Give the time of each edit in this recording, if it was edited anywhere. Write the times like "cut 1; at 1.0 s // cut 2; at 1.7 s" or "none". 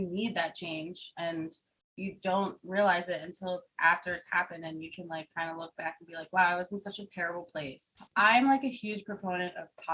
cut 1; at 8.1 s